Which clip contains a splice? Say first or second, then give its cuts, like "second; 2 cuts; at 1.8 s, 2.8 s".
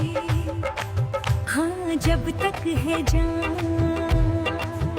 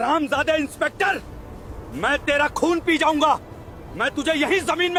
first; 1 cut; at 1.4 s